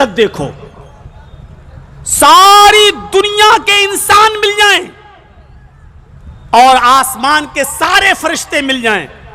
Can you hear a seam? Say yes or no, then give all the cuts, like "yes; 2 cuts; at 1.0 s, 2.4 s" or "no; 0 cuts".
no; 0 cuts